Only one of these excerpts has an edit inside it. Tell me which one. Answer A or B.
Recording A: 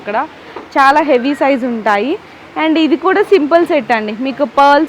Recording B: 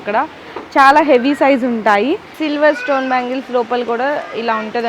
B